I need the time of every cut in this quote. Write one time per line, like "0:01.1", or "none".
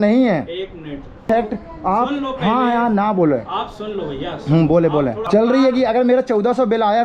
0:01.2
0:05.2